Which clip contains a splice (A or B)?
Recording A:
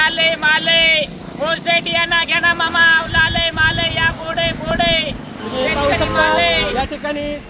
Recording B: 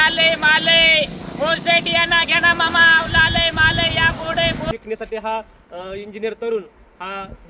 B